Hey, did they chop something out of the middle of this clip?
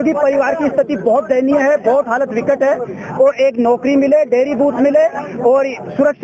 no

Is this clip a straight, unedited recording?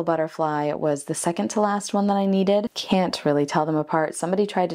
no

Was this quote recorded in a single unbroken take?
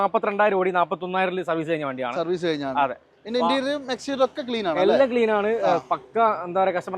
yes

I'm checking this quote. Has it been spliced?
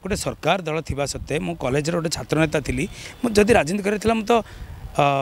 no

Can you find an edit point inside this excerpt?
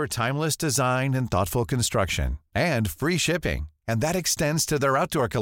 no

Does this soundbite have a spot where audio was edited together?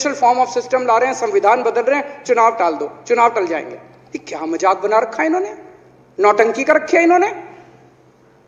no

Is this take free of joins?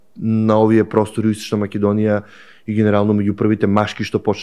yes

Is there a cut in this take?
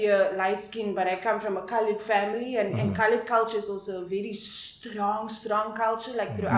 no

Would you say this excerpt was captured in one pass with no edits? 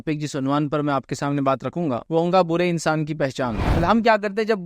no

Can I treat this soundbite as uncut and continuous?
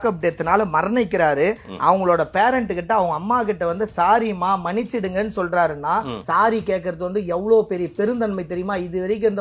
no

